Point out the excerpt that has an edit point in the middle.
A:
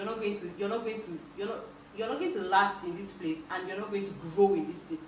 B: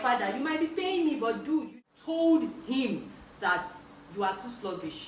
B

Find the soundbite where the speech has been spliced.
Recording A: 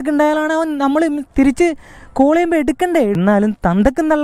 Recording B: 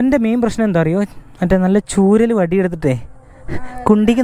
A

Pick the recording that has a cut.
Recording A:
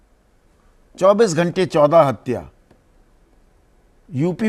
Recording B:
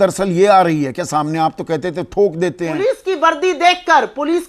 B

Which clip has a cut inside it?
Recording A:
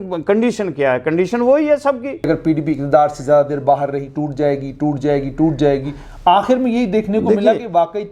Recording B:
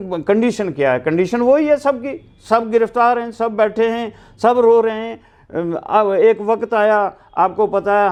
A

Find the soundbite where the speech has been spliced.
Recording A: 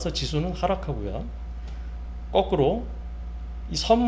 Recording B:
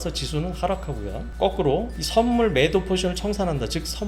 B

